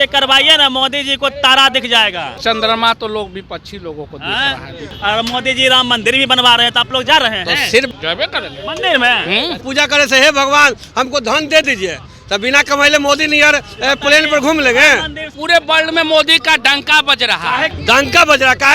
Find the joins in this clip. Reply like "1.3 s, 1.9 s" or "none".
2.4 s, 4.9 s, 7.9 s, 9.6 s, 15.4 s, 17.7 s